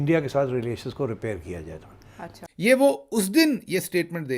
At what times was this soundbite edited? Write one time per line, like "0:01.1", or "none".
0:02.4